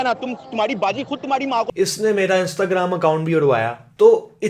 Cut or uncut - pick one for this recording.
cut